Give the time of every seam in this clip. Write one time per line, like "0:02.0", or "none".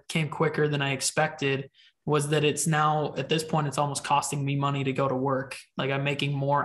none